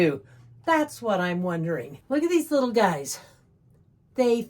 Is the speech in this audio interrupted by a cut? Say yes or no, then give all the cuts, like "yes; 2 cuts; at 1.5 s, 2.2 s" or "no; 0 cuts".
yes; 1 cut; at 1.9 s